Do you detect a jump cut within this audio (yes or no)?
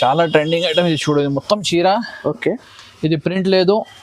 no